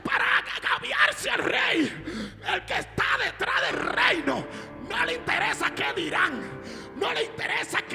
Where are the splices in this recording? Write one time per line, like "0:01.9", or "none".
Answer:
none